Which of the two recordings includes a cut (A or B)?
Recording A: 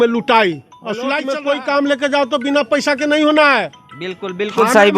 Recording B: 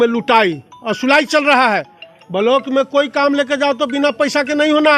A